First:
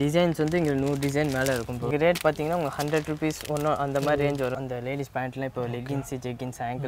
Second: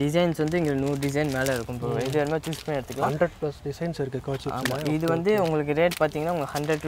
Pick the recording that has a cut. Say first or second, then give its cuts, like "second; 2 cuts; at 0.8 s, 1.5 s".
first; 2 cuts; at 1.9 s, 4.6 s